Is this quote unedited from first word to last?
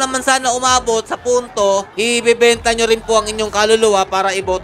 yes; 0 cuts

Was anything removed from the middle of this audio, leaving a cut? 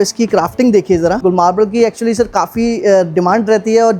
yes; 1 cut; at 1.2 s

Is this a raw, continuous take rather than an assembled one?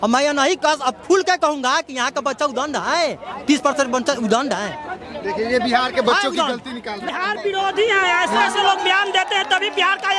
no; 1 cut; at 7.0 s

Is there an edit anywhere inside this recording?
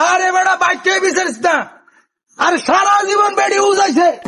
no; 0 cuts

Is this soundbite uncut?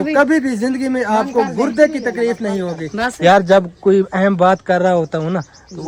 yes; 0 cuts

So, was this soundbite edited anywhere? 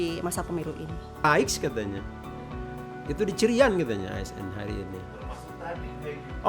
yes; 1 cut; at 1.2 s

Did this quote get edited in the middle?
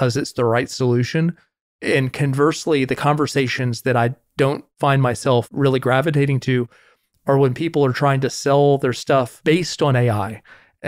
no; 0 cuts

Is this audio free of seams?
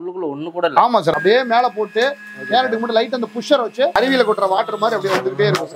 no; 2 cuts; at 1.1 s, 4.0 s

